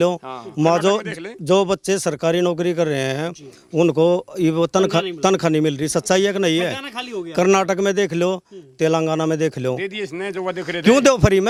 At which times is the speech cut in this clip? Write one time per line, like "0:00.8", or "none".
none

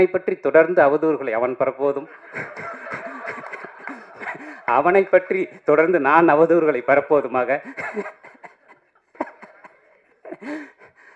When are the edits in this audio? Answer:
0:09.1

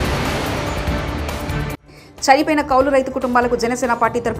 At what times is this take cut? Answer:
0:01.7

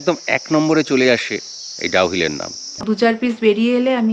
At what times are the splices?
0:02.9

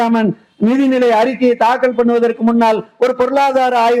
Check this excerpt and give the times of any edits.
none

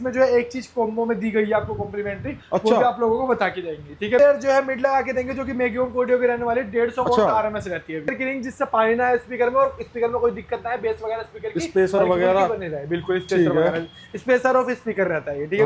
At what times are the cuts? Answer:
0:04.2
0:08.1

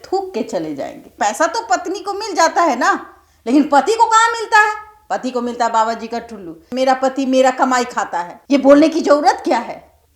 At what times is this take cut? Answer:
0:01.2
0:06.6

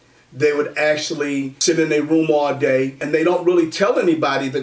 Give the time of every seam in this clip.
0:01.5
0:03.0

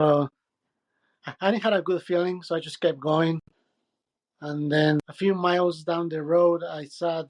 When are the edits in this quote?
0:05.0

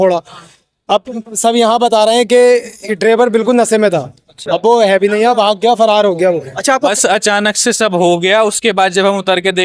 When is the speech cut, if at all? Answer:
0:06.9

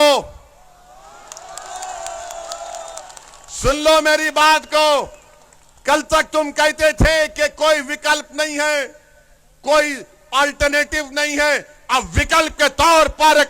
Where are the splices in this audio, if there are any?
none

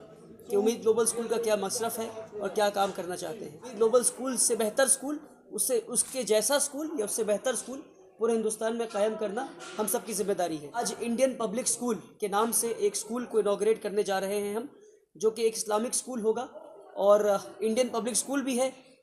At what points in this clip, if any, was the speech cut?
0:03.7
0:10.9

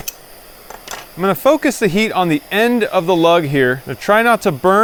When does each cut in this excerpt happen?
none

